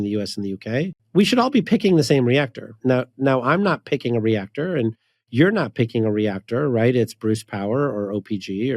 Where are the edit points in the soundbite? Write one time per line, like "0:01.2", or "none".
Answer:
0:01.0
0:02.7